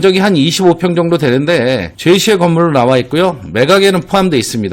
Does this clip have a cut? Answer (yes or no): no